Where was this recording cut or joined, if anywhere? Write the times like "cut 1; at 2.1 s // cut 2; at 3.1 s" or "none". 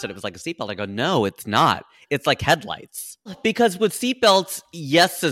cut 1; at 3.4 s